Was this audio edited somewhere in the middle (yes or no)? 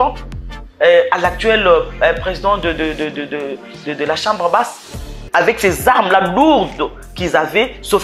yes